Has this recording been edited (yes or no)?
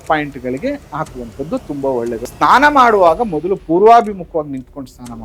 yes